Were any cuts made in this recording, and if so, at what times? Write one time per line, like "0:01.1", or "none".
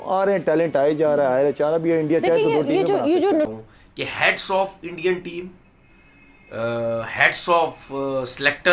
none